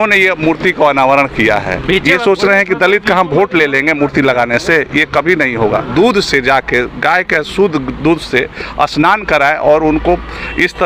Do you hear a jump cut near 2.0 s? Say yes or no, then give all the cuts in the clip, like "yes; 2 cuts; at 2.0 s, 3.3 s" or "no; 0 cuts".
yes; 2 cuts; at 2.0 s, 5.9 s